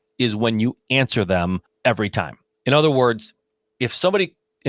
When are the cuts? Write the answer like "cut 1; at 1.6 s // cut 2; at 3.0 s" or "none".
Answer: cut 1; at 1.7 s